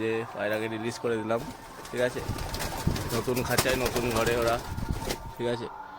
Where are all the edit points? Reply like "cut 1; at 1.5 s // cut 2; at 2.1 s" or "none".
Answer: none